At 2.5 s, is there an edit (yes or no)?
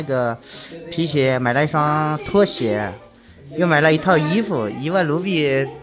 no